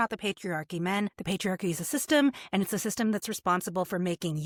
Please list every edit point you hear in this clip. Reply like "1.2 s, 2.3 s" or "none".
none